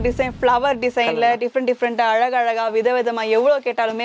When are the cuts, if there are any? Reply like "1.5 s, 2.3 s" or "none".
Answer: none